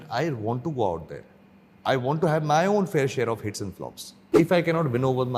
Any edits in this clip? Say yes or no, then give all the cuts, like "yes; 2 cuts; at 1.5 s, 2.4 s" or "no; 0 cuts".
yes; 1 cut; at 4.2 s